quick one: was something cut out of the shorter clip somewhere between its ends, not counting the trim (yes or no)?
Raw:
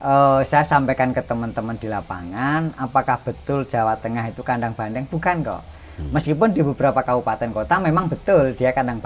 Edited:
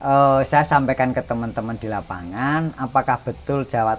no